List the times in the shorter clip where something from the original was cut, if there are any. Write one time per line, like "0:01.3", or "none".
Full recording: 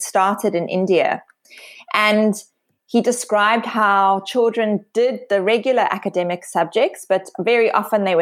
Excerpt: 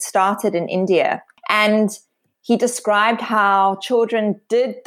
0:01.3

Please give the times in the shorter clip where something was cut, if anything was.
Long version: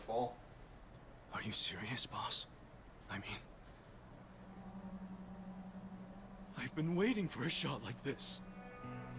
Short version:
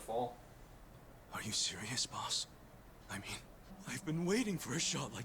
0:03.7

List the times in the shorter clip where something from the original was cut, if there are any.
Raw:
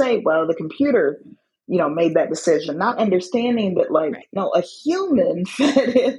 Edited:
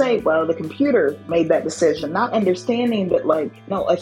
0:01.3

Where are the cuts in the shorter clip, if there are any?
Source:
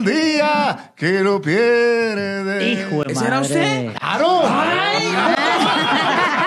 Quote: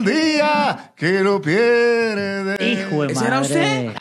none

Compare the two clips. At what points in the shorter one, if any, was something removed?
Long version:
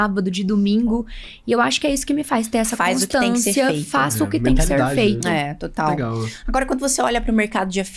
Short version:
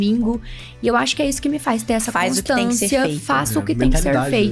none

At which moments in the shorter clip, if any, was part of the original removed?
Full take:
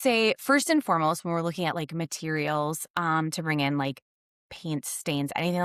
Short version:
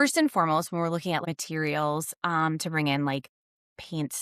0:01.2

